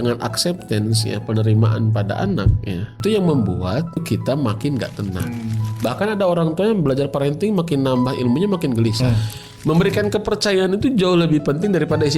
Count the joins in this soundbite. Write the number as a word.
four